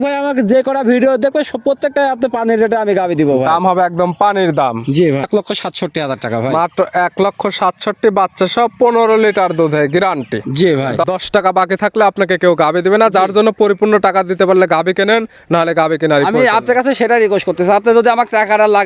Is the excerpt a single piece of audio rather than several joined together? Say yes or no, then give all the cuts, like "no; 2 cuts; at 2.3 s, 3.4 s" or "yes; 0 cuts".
no; 2 cuts; at 5.3 s, 11.0 s